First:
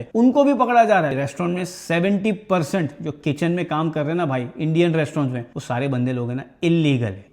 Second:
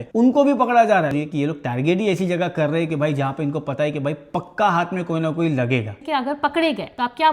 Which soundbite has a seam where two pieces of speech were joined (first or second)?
second